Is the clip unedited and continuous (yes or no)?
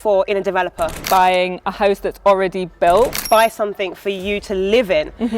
no